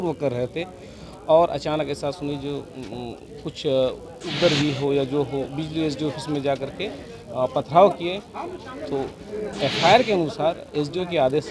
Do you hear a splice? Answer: no; 0 cuts

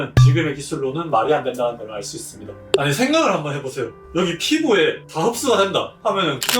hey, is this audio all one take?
no; 1 cut; at 2.6 s

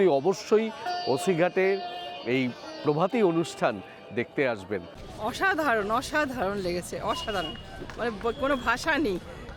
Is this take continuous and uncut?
no; 1 cut; at 5.1 s

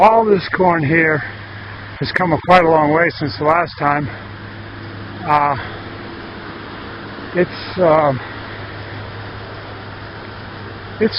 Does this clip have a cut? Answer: no; 0 cuts

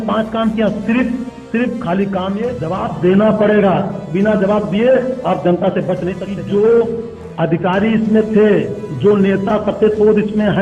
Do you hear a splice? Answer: yes; 2 cuts; at 2.6 s, 6.2 s

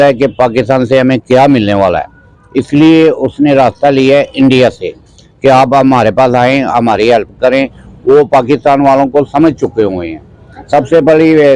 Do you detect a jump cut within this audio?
no; 0 cuts

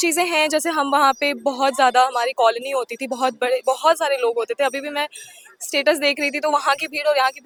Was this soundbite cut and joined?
no; 0 cuts

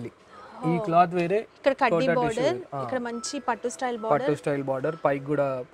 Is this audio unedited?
yes; 0 cuts

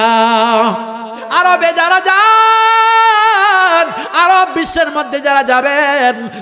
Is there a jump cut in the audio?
yes; 1 cut; at 1.2 s

